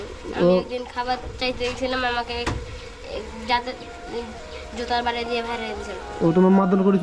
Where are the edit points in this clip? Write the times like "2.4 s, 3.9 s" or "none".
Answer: none

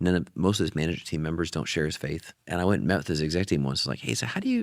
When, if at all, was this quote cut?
2.3 s

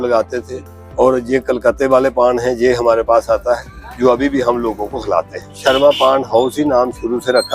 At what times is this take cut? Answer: 5.4 s

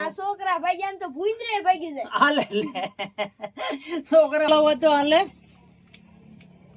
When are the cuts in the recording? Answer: 4.5 s

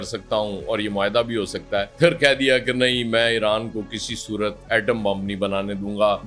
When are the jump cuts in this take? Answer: 1.9 s

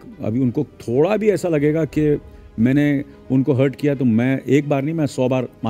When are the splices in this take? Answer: none

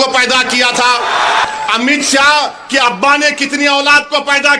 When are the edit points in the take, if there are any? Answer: 1.5 s

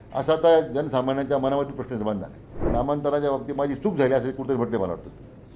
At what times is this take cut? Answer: 2.6 s

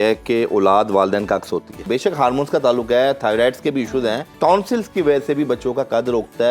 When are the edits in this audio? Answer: 1.8 s, 4.3 s

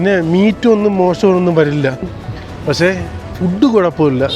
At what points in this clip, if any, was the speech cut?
2.2 s

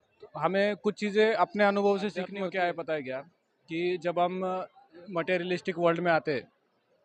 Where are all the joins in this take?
2.3 s

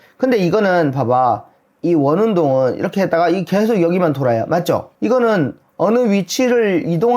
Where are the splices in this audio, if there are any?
4.9 s

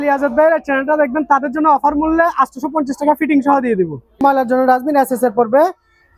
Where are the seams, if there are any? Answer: 4.2 s

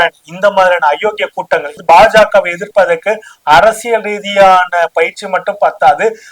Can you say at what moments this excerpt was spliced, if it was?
1.8 s

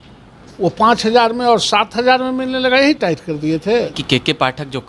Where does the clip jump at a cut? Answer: 4.0 s

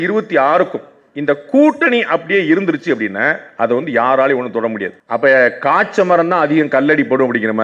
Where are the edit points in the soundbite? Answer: 5.0 s

